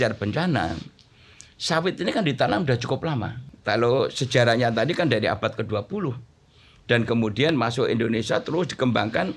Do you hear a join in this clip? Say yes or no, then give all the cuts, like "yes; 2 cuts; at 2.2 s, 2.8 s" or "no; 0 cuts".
yes; 1 cut; at 3.4 s